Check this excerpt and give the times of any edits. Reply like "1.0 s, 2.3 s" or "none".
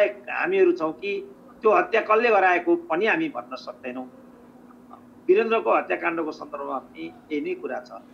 none